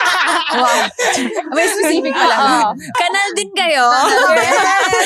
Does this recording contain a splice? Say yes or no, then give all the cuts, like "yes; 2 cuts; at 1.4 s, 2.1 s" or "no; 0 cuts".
yes; 1 cut; at 2.9 s